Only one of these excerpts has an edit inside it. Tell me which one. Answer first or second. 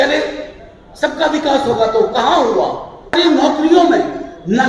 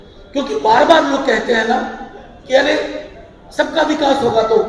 first